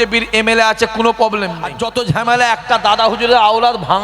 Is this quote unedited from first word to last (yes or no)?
no